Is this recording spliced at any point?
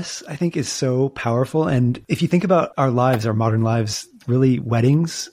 yes; 1 cut; at 2.7 s

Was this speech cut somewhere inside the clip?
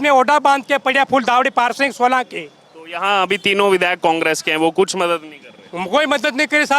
no; 0 cuts

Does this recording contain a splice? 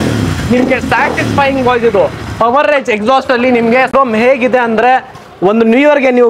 yes; 1 cut; at 3.9 s

